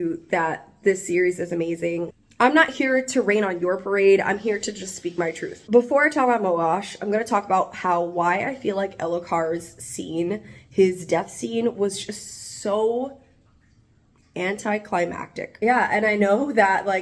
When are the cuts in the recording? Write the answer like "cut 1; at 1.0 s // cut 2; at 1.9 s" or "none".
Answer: cut 1; at 2.1 s // cut 2; at 15.5 s